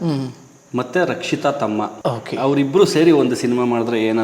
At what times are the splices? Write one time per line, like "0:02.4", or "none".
0:01.9